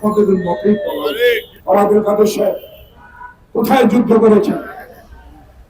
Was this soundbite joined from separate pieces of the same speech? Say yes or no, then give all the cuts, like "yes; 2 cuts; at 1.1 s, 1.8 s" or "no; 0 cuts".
yes; 1 cut; at 1.6 s